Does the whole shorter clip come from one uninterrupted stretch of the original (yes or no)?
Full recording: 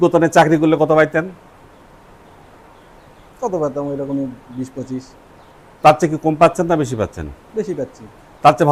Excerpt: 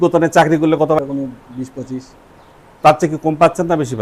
no